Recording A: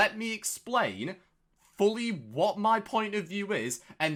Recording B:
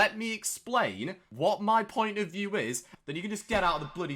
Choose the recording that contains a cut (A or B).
B